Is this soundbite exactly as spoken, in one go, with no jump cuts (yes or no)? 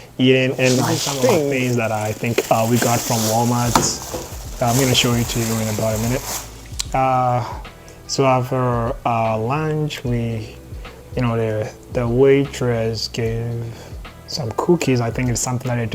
no